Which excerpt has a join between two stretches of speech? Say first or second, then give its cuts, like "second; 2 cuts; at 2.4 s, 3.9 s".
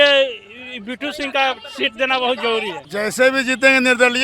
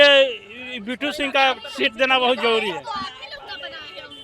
first; 1 cut; at 2.8 s